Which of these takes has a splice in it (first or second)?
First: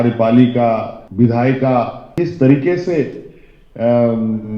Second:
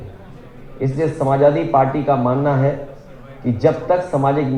first